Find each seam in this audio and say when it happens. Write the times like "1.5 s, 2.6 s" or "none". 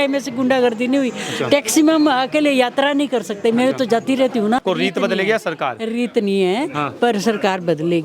4.6 s